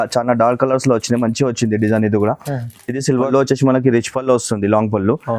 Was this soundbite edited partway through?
yes; 1 cut; at 3.2 s

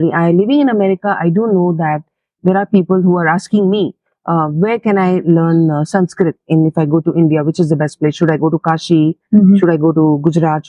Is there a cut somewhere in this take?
no; 0 cuts

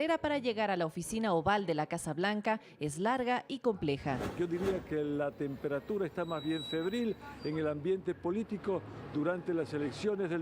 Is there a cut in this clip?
yes; 1 cut; at 4.3 s

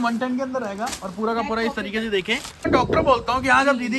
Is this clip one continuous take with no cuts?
no; 1 cut; at 2.5 s

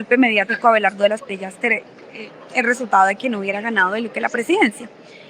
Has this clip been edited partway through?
no; 0 cuts

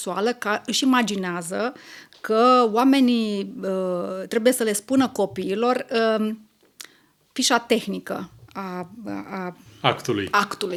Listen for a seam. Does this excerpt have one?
no; 0 cuts

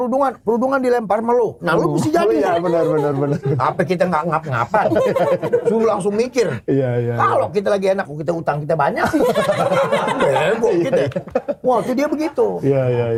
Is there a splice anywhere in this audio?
no; 0 cuts

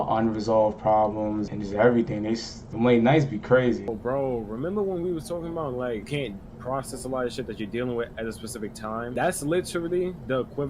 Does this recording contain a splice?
yes; 5 cuts; at 1.5 s, 2.6 s, 3.9 s, 6.1 s, 9.1 s

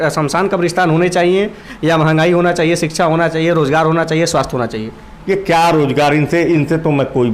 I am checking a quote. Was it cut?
no; 0 cuts

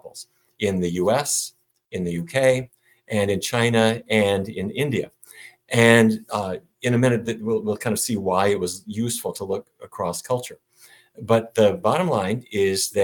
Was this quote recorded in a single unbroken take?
yes; 0 cuts

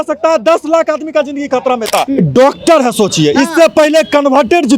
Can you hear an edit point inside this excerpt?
yes; 1 cut; at 2.1 s

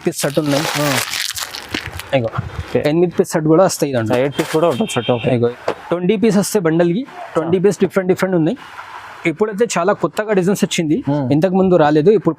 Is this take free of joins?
no; 1 cut; at 5.5 s

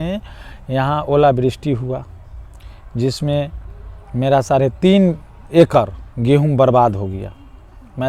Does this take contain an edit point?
no; 0 cuts

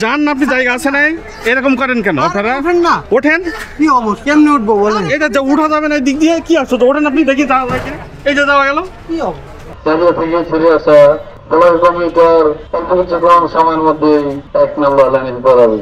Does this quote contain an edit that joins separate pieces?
yes; 4 cuts; at 9.8 s, 11.3 s, 12.7 s, 14.4 s

